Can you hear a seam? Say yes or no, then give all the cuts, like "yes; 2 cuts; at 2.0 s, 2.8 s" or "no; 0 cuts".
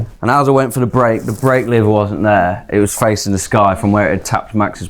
no; 0 cuts